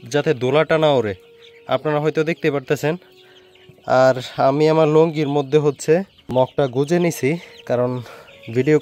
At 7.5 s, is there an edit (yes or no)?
yes